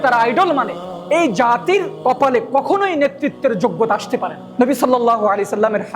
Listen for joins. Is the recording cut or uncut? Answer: cut